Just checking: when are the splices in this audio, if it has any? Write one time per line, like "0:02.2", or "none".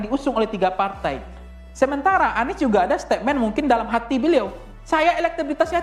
none

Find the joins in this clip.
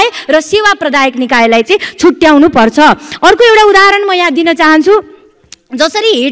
none

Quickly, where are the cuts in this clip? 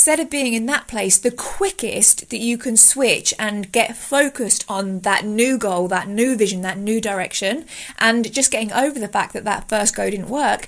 none

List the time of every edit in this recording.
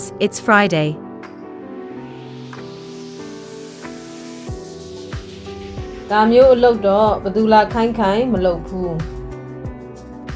none

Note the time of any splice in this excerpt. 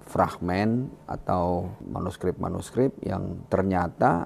0:01.8

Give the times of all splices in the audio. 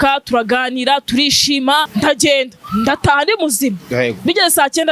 0:01.9

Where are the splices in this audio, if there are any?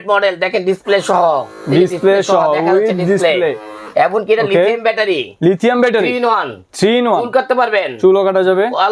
none

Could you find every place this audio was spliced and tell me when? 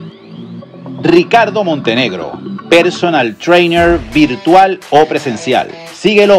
0:01.0

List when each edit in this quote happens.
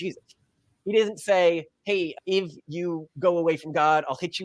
none

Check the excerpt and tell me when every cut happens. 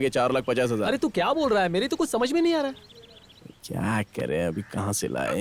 none

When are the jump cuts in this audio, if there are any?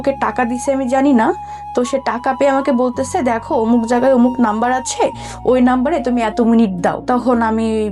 0:07.0

